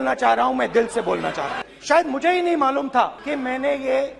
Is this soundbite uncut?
no; 1 cut; at 1.5 s

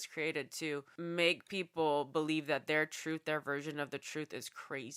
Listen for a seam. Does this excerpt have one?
yes; 1 cut; at 0.9 s

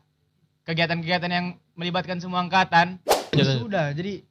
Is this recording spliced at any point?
yes; 1 cut; at 3.3 s

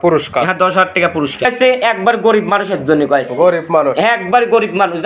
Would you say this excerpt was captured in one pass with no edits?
no; 1 cut; at 1.5 s

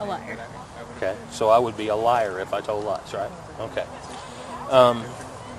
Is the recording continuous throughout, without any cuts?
yes; 0 cuts

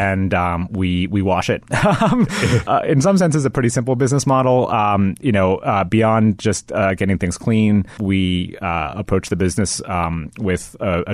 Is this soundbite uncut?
no; 2 cuts; at 2.6 s, 8.0 s

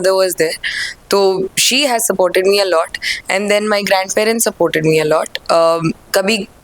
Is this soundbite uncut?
yes; 0 cuts

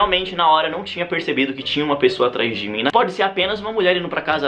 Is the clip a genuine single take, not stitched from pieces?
no; 1 cut; at 2.9 s

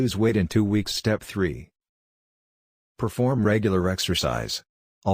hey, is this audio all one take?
no; 1 cut; at 1.2 s

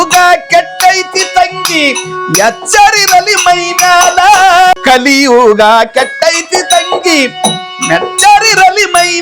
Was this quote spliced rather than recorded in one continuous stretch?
yes; 1 cut; at 4.8 s

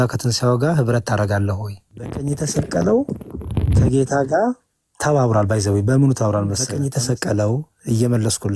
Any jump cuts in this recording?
yes; 2 cuts; at 2.2 s, 6.7 s

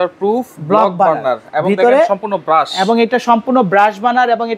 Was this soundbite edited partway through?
no; 0 cuts

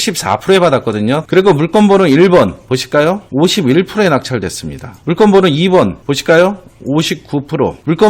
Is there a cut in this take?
yes; 1 cut; at 1.2 s

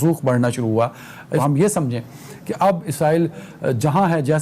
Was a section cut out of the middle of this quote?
yes; 1 cut; at 1.4 s

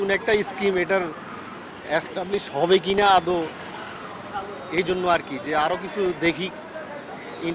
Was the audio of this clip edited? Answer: no; 0 cuts

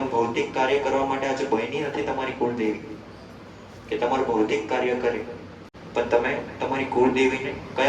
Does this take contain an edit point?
no; 0 cuts

